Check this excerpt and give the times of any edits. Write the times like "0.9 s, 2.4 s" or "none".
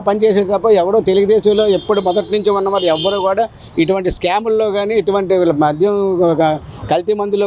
none

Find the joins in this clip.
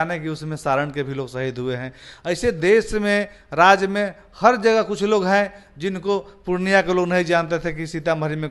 none

